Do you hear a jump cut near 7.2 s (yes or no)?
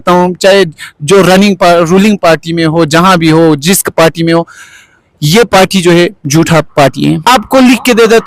yes